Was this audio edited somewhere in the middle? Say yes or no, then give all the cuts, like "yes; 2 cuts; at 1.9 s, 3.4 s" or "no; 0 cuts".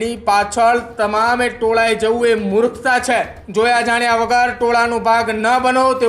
yes; 1 cut; at 3.4 s